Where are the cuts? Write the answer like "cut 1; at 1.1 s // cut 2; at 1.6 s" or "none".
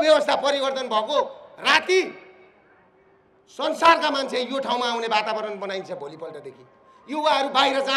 none